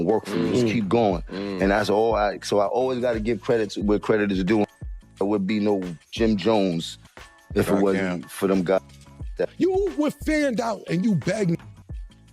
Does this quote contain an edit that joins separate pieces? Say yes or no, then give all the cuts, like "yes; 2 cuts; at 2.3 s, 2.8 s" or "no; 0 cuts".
yes; 1 cut; at 9.4 s